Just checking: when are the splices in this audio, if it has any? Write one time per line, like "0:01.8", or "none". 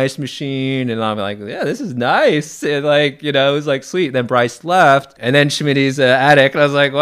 0:05.1